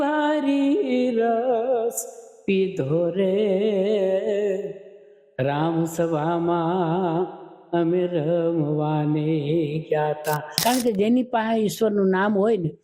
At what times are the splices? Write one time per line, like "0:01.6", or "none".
0:10.5